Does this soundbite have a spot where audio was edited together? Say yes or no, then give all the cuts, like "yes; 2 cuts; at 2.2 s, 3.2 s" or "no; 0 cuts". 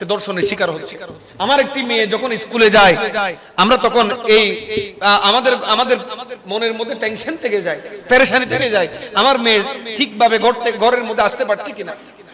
no; 0 cuts